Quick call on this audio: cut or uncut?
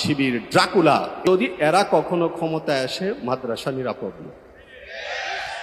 cut